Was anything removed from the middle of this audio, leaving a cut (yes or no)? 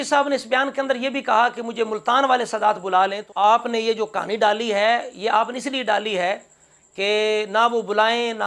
yes